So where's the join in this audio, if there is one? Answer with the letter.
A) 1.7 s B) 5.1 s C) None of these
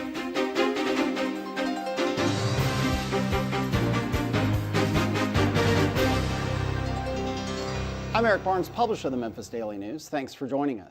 B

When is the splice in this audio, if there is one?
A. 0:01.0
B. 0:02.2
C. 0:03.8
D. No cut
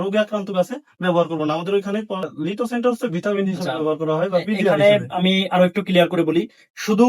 B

